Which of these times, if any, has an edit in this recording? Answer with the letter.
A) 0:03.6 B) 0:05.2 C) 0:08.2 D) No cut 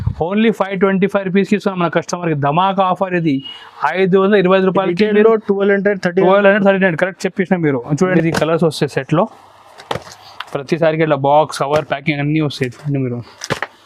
C